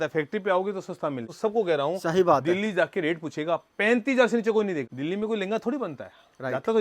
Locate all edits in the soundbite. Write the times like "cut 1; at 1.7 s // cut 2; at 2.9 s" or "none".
cut 1; at 1.3 s // cut 2; at 4.9 s